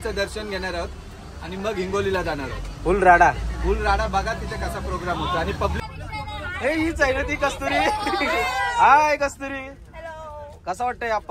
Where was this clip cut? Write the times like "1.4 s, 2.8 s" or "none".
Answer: 5.8 s